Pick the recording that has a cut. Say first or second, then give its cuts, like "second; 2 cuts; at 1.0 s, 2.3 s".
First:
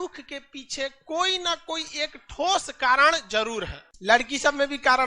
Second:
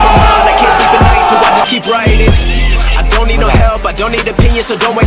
first; 1 cut; at 3.4 s